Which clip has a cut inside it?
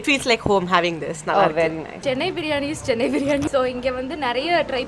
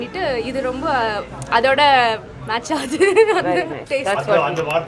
first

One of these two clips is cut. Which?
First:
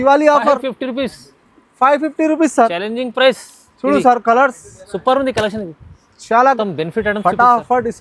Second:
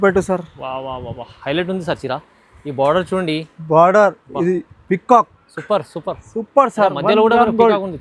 first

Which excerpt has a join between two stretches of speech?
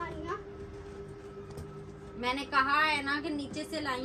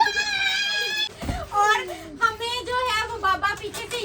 second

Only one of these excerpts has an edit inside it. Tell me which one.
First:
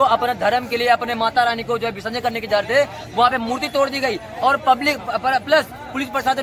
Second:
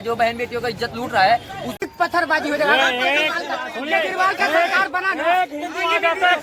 second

